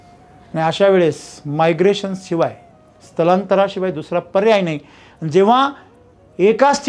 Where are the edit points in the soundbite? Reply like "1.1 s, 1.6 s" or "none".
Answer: none